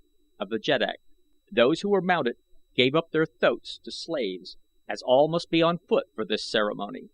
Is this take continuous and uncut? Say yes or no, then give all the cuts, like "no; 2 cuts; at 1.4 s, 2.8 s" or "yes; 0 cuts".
no; 1 cut; at 4.5 s